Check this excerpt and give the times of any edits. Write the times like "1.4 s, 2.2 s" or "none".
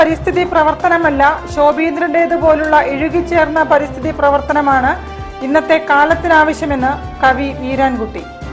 none